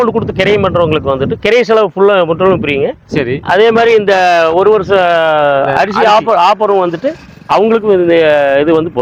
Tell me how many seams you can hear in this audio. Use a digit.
0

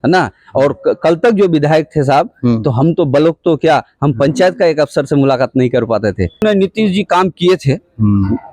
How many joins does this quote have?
1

